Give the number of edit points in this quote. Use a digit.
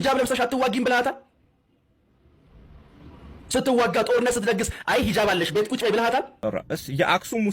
1